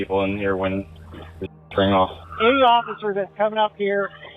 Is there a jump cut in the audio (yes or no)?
no